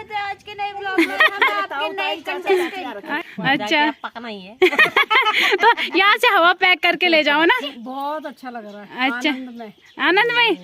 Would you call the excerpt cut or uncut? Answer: cut